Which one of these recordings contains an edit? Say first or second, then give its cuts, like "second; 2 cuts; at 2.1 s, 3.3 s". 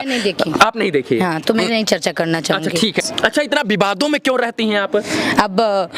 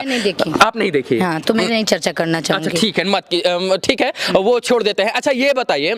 first; 1 cut; at 3.1 s